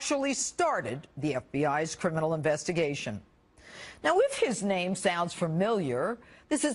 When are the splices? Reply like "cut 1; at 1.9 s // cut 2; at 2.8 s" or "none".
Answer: cut 1; at 3.7 s